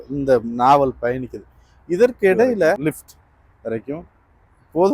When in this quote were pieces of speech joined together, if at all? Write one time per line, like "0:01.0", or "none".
0:02.8